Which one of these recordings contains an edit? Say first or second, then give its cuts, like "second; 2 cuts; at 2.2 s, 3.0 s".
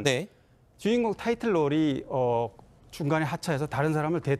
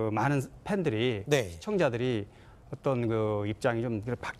second; 1 cut; at 1.1 s